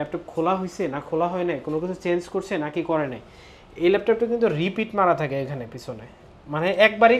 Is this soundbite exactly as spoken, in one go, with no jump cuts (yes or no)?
yes